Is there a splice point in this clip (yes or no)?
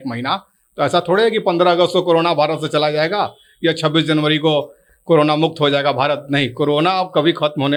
no